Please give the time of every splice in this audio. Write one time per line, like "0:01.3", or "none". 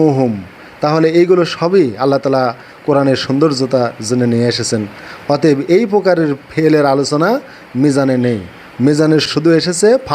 0:09.3